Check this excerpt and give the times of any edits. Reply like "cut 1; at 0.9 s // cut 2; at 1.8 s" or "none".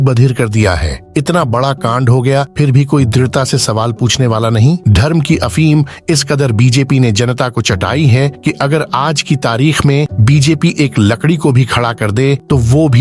cut 1; at 4.8 s